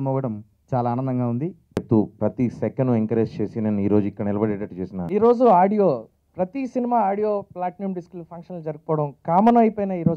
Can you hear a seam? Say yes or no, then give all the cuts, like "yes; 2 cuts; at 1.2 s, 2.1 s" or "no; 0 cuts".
yes; 2 cuts; at 1.8 s, 5.0 s